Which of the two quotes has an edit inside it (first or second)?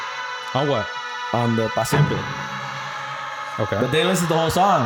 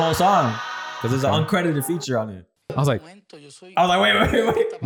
second